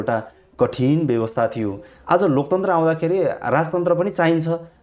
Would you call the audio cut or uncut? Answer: uncut